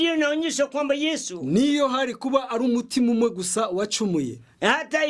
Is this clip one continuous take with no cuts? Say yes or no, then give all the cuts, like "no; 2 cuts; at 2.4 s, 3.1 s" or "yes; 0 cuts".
yes; 0 cuts